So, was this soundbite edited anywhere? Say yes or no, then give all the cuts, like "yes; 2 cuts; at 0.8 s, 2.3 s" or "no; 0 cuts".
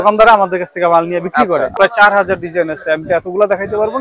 yes; 1 cut; at 1.7 s